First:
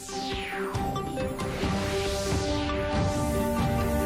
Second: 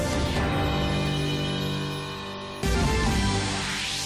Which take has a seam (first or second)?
second